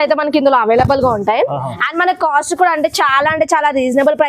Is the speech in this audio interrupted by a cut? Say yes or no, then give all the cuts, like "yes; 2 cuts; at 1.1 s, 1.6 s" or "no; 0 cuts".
no; 0 cuts